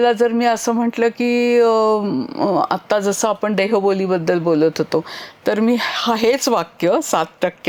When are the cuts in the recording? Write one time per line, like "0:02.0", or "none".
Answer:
none